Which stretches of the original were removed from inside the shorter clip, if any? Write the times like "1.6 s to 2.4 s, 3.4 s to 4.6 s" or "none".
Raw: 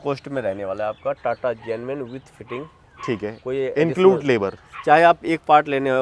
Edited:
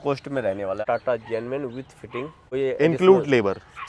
0.8 s to 1.2 s, 2.8 s to 3.4 s